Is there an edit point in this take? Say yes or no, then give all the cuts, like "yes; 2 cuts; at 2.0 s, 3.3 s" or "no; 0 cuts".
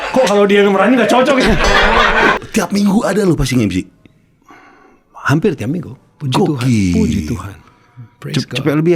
yes; 1 cut; at 2.4 s